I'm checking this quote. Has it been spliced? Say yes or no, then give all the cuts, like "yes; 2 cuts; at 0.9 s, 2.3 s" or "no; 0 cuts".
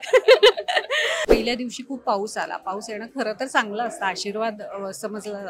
yes; 1 cut; at 1.2 s